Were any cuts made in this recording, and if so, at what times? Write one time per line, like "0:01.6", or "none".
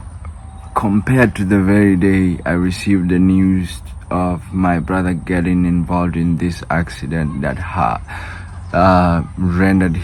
none